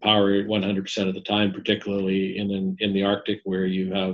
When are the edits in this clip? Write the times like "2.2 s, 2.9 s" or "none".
none